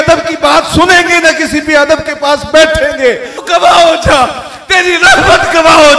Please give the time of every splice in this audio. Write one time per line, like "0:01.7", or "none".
0:03.4

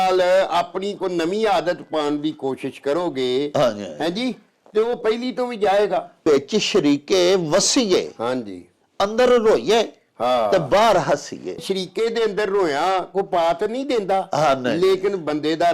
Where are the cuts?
0:06.2
0:11.6

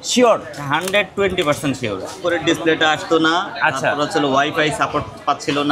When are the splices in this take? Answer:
0:02.2

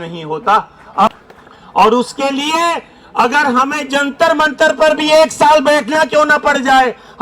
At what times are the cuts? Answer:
0:01.1

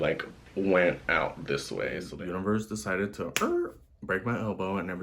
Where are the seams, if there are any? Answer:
0:02.0

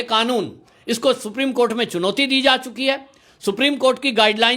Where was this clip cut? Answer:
none

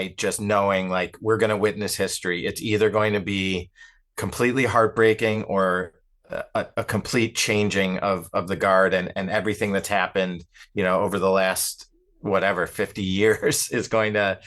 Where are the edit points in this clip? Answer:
none

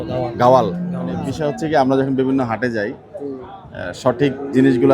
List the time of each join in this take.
0:01.3

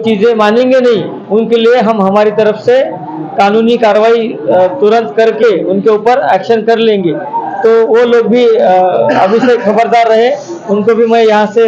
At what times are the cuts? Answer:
none

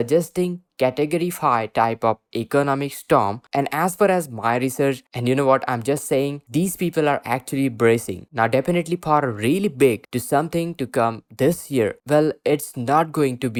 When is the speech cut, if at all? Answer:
none

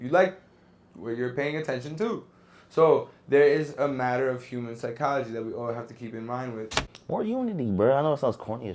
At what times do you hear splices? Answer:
0:06.8

